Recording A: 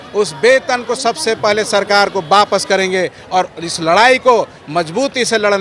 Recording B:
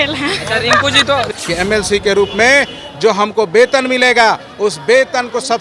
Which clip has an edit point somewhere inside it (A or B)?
B